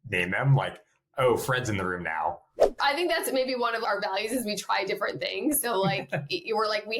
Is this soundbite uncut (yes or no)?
no